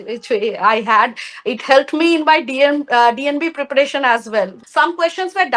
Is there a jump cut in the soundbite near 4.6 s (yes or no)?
yes